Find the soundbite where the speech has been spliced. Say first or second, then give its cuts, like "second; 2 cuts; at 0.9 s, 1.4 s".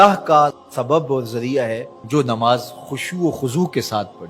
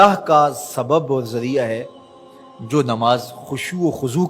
first; 1 cut; at 1.9 s